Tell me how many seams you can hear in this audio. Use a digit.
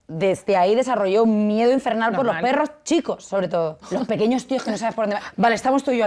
2